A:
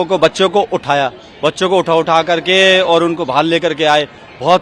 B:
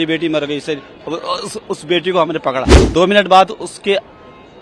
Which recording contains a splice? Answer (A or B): B